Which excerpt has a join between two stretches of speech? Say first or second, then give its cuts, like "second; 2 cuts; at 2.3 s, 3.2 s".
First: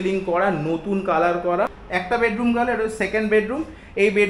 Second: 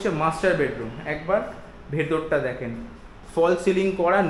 first; 1 cut; at 1.8 s